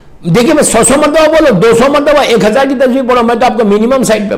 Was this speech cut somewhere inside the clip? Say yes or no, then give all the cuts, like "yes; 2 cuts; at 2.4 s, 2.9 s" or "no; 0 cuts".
no; 0 cuts